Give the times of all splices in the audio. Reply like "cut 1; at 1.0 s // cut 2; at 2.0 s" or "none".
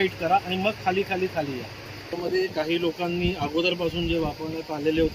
cut 1; at 2.1 s

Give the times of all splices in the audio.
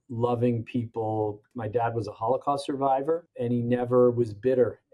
cut 1; at 1.5 s // cut 2; at 3.3 s

